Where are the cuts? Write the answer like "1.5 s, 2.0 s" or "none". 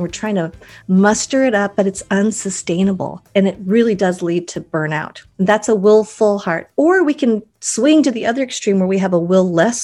3.2 s, 5.2 s

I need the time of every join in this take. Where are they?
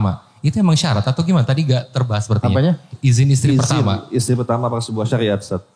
none

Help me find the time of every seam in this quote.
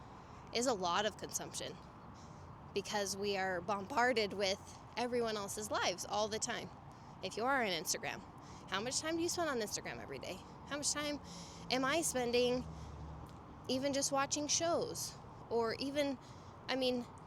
none

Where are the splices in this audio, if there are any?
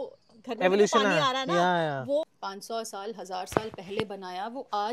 2.3 s

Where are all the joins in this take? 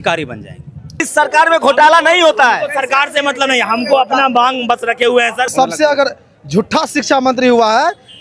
1.1 s, 5.5 s

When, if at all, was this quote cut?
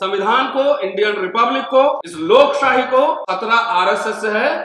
2.1 s, 3.2 s

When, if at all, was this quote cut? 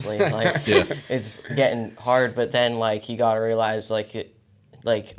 none

